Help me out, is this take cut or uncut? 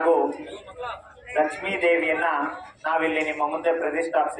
uncut